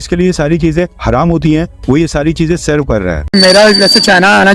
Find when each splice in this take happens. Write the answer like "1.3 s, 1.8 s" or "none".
3.3 s